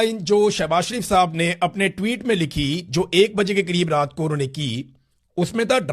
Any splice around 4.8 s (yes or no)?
no